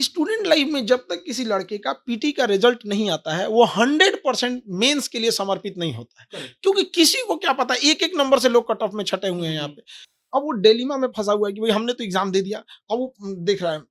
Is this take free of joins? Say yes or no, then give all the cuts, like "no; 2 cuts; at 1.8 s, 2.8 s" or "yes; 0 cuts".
yes; 0 cuts